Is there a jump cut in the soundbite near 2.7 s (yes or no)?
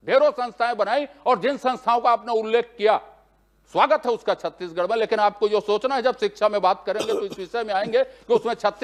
no